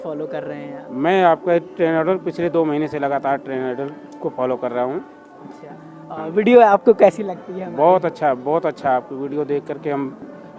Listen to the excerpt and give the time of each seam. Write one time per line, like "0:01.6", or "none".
none

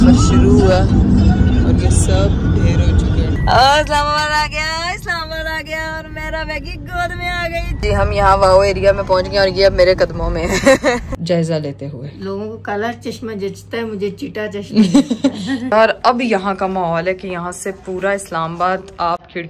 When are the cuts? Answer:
0:03.4
0:07.7
0:11.2
0:15.6

